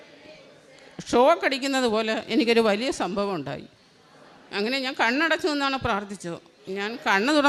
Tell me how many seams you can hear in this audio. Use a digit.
0